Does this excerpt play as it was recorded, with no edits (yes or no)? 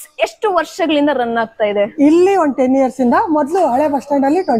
yes